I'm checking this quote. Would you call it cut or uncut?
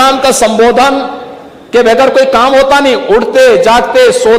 uncut